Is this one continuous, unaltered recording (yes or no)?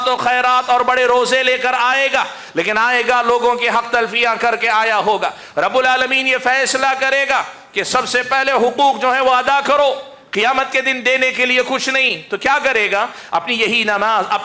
yes